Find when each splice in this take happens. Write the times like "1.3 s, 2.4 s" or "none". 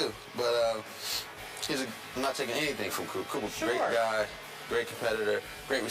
4.7 s